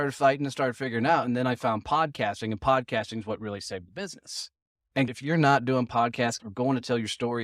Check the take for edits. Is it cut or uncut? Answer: cut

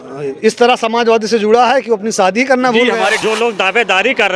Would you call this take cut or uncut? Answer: cut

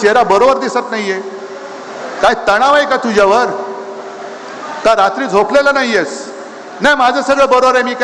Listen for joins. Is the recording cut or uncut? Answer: uncut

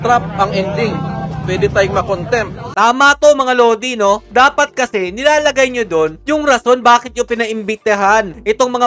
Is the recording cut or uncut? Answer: uncut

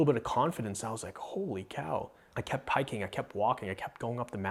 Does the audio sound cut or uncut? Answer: uncut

